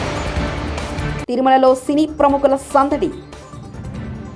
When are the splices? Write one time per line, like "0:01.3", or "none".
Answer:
none